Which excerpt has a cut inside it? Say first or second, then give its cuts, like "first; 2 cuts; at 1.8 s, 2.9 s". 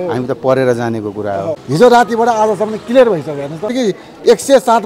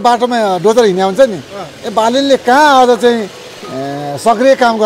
first; 2 cuts; at 1.6 s, 3.7 s